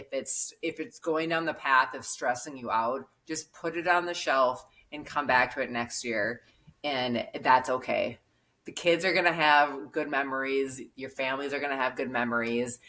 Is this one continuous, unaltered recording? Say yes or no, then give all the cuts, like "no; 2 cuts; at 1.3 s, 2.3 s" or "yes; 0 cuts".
yes; 0 cuts